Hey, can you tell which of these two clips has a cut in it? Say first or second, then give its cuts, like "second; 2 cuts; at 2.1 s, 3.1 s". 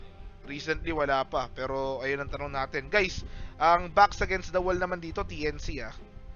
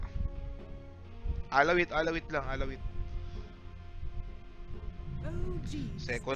first; 1 cut; at 0.9 s